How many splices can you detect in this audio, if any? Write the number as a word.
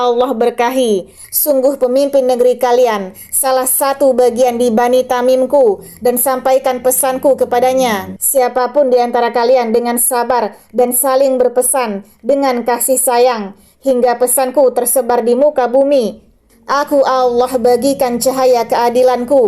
one